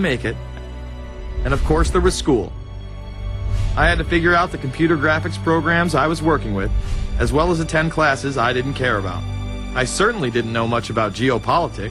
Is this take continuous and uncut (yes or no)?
no